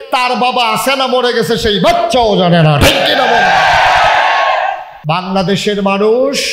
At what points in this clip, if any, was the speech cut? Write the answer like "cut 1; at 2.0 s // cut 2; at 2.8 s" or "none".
cut 1; at 4.9 s

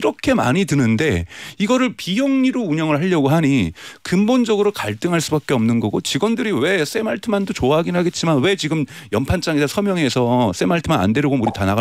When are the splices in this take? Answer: none

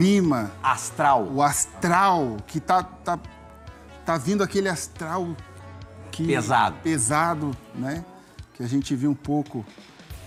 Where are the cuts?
none

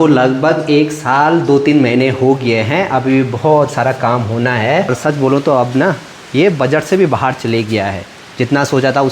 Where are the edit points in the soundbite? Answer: cut 1; at 4.9 s

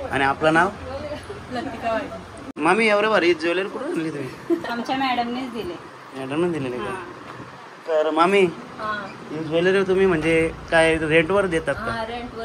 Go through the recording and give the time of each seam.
cut 1; at 2.5 s

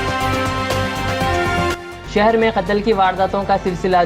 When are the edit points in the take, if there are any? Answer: cut 1; at 1.7 s

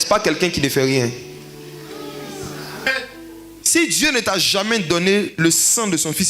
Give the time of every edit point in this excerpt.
cut 1; at 2.9 s

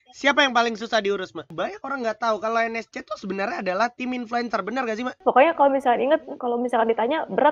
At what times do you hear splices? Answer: cut 1; at 1.5 s // cut 2; at 5.2 s

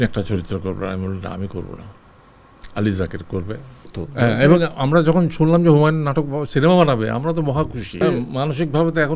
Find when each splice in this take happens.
cut 1; at 4.0 s // cut 2; at 8.0 s

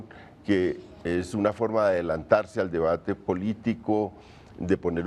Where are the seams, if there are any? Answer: cut 1; at 2.2 s

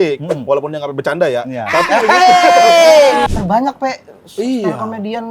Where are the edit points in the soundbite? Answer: cut 1; at 3.3 s

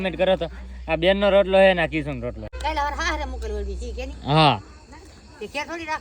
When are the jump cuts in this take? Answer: cut 1; at 2.5 s

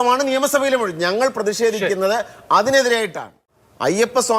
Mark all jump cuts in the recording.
cut 1; at 3.4 s

